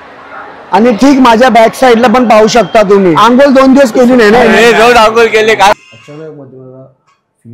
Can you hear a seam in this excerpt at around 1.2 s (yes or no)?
no